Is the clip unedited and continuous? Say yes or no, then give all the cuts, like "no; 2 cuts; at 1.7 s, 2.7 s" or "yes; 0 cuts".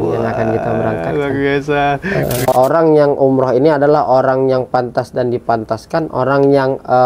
no; 1 cut; at 2.4 s